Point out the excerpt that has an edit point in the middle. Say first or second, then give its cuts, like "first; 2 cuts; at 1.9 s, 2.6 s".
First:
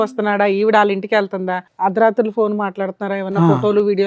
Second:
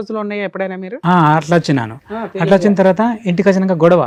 first; 1 cut; at 1.6 s